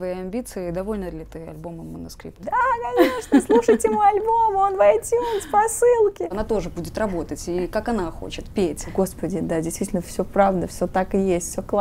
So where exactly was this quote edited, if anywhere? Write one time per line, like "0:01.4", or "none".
0:02.3
0:06.3
0:08.9